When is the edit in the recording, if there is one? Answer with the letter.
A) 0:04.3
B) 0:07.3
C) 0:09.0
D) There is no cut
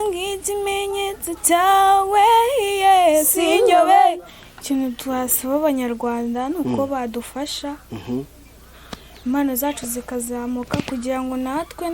A